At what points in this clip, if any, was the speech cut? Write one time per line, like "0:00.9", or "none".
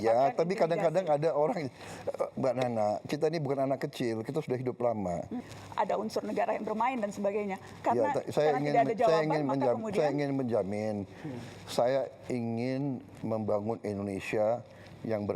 0:05.5